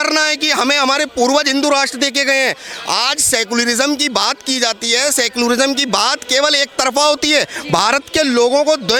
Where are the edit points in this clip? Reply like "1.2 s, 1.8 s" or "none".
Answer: none

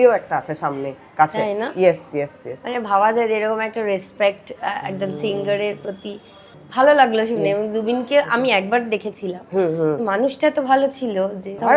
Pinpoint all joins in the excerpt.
none

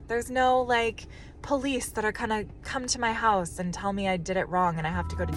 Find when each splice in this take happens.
none

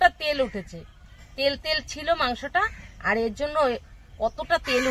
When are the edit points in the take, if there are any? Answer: none

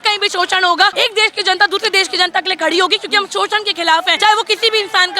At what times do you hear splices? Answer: 0.9 s, 4.1 s

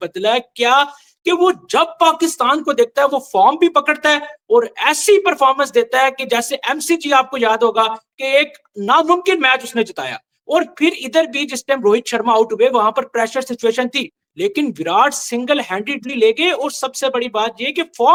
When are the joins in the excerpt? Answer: none

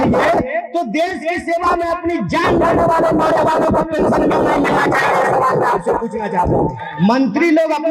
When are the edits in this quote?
6.8 s

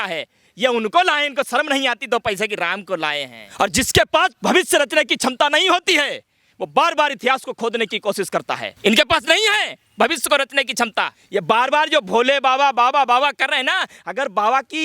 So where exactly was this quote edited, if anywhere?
3.4 s, 8.7 s, 11.2 s

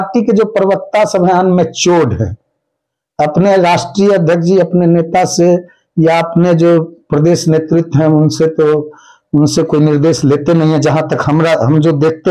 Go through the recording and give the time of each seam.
none

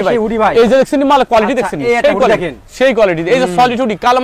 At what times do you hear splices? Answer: none

